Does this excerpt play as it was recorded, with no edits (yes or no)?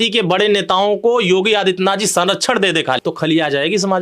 no